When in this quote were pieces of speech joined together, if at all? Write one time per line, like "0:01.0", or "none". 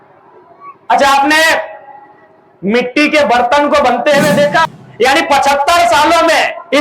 0:04.6